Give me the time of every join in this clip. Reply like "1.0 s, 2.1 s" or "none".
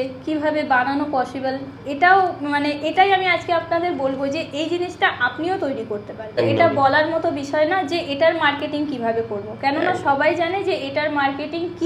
6.4 s

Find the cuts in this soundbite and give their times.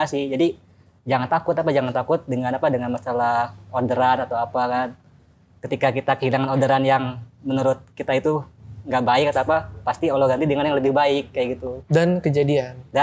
none

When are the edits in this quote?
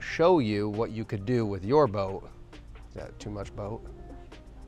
none

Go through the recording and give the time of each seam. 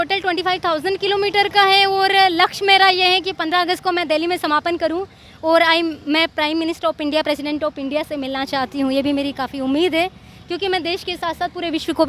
none

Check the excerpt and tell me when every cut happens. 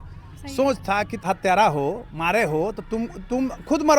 1.2 s

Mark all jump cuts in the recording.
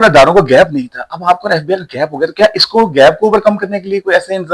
none

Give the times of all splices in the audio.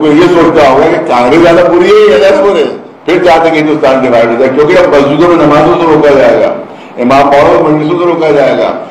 2.9 s

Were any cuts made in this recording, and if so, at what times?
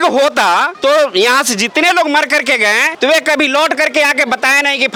none

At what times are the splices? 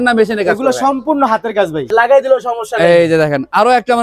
1.9 s

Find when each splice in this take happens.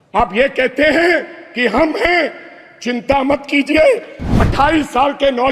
4.4 s

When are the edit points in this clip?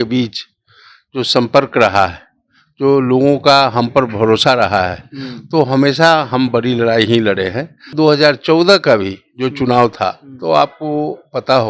7.9 s

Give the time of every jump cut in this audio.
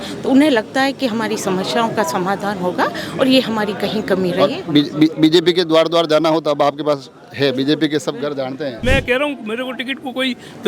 8.8 s

